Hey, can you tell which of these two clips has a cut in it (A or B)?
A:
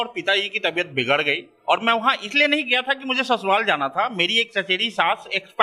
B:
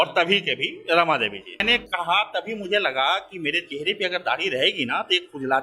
B